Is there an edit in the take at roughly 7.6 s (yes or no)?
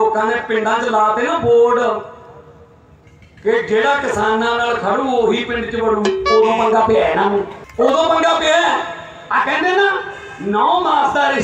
yes